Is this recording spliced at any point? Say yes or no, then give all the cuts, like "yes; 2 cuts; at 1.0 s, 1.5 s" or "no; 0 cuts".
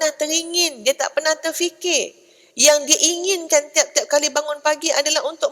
no; 0 cuts